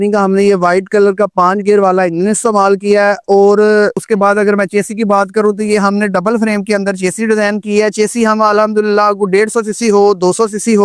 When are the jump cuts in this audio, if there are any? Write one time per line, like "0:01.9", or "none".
none